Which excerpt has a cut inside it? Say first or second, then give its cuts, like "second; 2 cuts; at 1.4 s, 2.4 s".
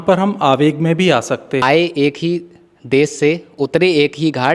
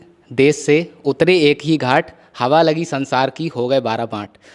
first; 1 cut; at 1.6 s